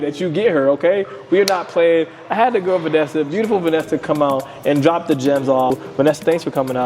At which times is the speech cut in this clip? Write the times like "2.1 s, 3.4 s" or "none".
5.8 s

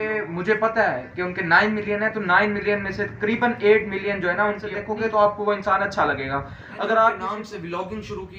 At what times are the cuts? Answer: 4.8 s, 7.2 s

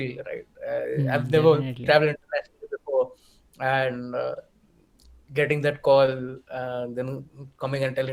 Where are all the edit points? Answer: none

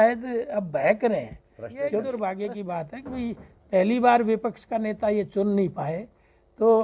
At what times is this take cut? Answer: 2.0 s

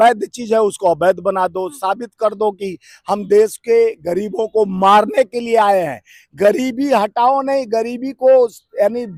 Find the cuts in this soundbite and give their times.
none

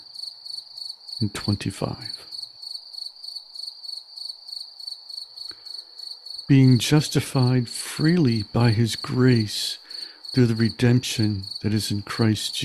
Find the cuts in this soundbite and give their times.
2.3 s, 6.5 s

